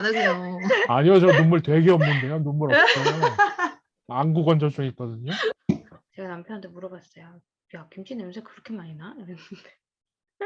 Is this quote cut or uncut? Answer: cut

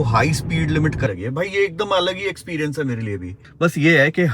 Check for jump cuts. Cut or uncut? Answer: cut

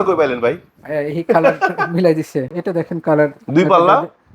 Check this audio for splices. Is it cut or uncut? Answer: cut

